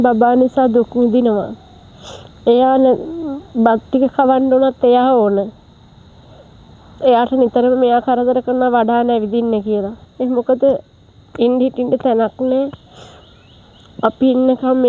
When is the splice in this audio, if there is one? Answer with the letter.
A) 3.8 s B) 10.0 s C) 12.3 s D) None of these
B